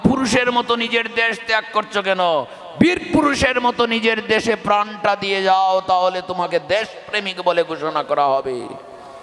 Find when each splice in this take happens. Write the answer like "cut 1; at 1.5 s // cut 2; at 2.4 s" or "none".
none

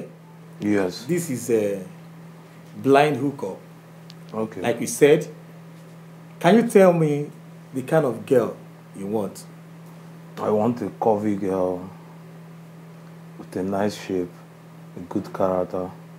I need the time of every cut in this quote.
none

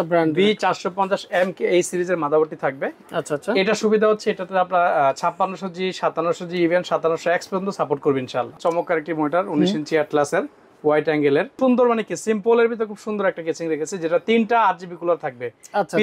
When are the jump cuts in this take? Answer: cut 1; at 8.5 s // cut 2; at 11.5 s

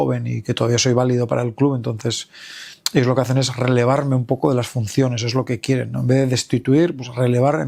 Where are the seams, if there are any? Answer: none

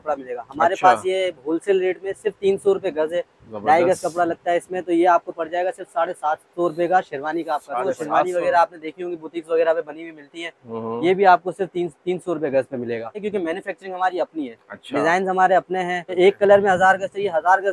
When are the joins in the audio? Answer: cut 1; at 8.3 s // cut 2; at 13.3 s // cut 3; at 16.1 s

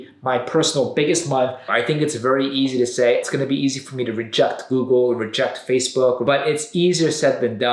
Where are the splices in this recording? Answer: cut 1; at 1.7 s // cut 2; at 3.2 s // cut 3; at 6.2 s

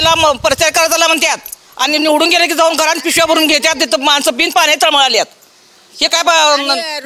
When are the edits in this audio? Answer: none

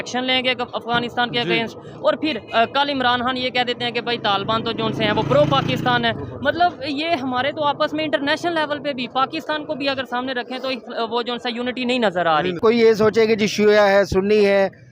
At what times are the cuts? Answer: cut 1; at 12.6 s

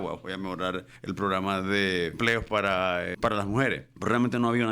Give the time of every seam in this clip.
cut 1; at 0.9 s // cut 2; at 2.1 s // cut 3; at 3.1 s // cut 4; at 3.9 s

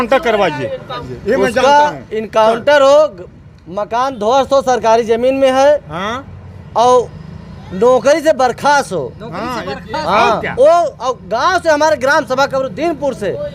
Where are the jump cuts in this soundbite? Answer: cut 1; at 1.1 s

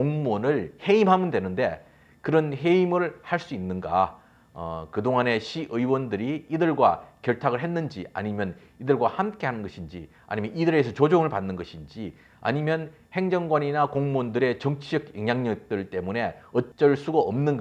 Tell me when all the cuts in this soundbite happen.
cut 1; at 16.7 s

